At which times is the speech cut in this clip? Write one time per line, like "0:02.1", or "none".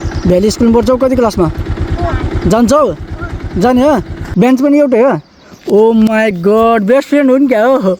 0:04.2